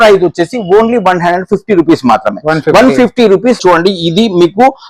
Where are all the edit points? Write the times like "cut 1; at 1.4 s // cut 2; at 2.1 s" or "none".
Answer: cut 1; at 3.6 s